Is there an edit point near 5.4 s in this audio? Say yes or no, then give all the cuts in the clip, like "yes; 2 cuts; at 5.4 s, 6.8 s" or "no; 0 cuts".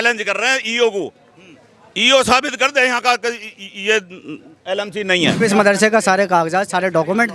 yes; 1 cut; at 5.4 s